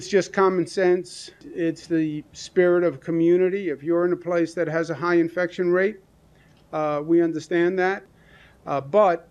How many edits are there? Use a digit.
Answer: 2